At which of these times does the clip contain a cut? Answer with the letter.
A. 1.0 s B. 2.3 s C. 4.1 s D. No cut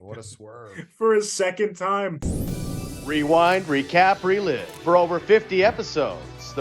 B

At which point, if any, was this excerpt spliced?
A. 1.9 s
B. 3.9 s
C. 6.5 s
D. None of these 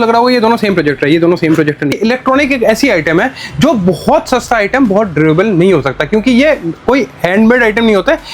A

